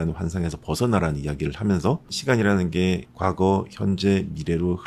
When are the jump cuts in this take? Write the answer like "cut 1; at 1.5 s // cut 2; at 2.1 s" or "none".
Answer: cut 1; at 2.2 s // cut 2; at 3.1 s